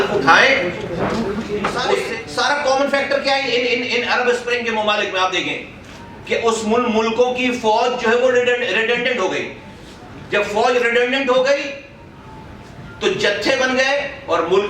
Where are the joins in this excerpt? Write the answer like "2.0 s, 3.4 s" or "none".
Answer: 2.0 s